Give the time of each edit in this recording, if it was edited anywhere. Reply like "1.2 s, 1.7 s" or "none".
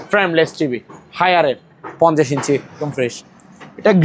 2.8 s